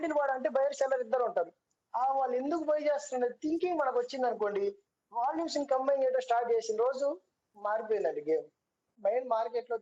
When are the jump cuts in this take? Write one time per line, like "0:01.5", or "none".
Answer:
0:08.9